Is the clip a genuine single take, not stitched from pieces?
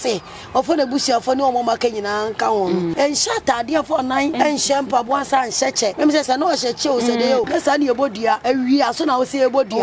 no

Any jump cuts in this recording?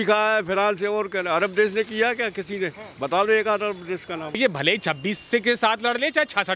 yes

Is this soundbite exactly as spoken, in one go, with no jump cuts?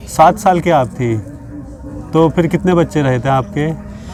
yes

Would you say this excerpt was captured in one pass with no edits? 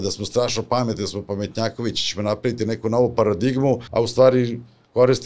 no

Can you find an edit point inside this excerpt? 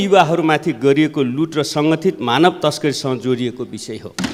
no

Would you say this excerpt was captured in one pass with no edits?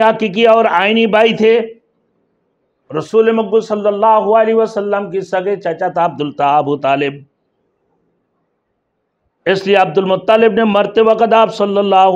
yes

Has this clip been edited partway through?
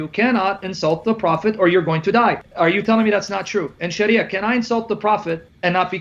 no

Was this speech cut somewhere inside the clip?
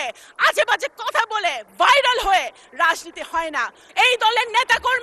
yes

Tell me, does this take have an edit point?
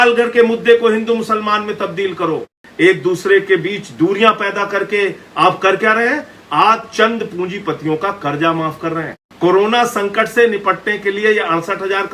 yes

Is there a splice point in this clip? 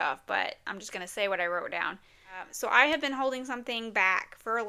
yes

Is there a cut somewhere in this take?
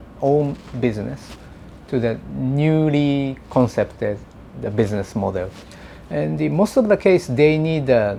no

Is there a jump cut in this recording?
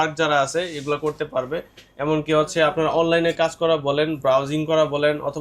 no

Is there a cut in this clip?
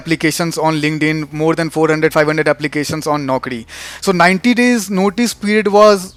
no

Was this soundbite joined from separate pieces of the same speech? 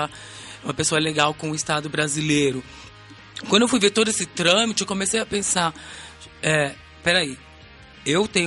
no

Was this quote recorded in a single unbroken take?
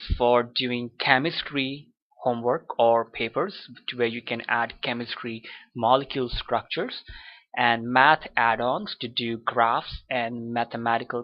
no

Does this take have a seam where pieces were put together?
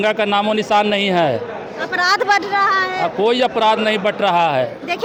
no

